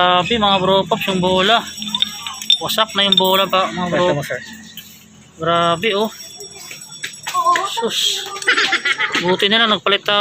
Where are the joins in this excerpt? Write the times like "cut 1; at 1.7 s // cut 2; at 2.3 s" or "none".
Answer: none